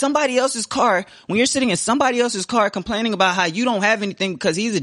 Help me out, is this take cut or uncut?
uncut